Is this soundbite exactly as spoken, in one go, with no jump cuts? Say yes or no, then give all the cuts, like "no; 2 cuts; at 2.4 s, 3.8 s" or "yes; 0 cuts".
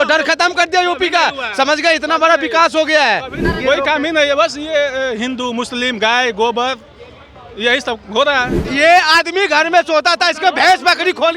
no; 2 cuts; at 3.4 s, 8.6 s